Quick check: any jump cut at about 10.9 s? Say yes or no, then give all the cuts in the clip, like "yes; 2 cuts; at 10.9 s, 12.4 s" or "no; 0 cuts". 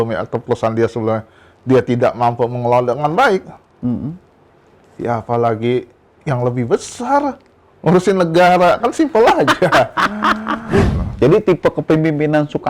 yes; 1 cut; at 10.9 s